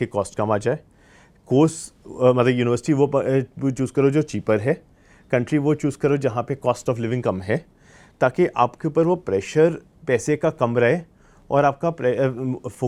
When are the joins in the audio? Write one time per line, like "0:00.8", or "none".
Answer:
none